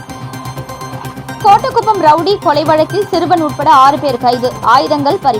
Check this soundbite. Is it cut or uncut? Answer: uncut